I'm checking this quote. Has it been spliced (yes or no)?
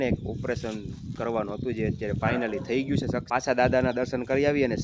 yes